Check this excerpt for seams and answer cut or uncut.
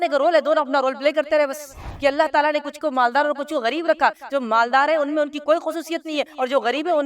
cut